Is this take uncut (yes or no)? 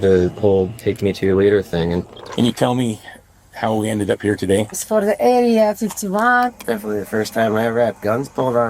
no